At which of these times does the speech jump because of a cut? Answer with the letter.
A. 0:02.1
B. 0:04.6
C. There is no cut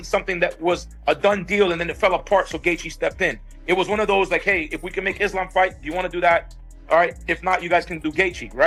C